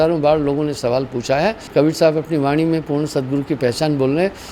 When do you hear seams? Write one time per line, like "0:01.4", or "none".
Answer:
0:01.6